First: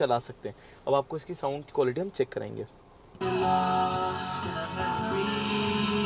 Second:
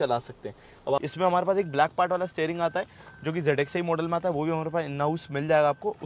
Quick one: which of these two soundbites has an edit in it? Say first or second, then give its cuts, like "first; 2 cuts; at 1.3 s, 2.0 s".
second; 1 cut; at 1.0 s